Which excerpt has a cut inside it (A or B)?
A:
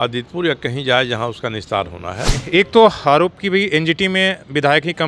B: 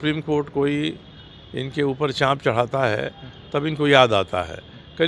A